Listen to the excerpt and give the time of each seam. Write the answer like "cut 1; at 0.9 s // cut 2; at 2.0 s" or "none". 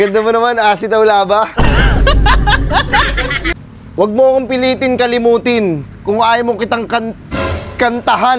cut 1; at 3.4 s